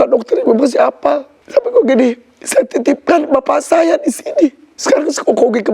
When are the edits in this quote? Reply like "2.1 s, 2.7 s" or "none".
1.4 s, 4.7 s

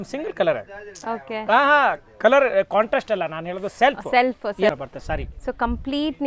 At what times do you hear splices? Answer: 4.7 s

